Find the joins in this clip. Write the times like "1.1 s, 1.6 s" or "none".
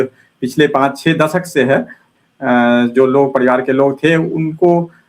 2.1 s